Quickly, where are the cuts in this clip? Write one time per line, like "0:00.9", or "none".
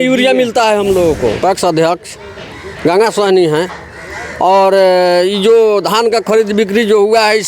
0:01.4